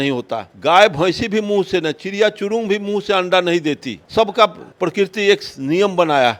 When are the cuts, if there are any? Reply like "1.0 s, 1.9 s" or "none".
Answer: none